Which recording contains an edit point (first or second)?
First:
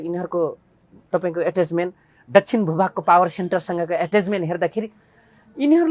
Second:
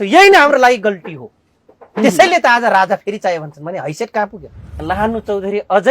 second